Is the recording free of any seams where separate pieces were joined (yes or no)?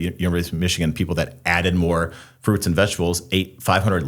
yes